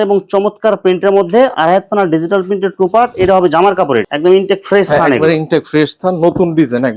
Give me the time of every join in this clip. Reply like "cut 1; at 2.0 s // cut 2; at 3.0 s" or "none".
cut 1; at 4.1 s